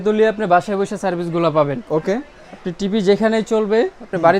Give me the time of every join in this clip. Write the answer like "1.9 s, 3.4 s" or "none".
none